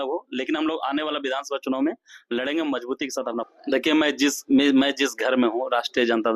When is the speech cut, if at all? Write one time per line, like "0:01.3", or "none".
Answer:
0:03.5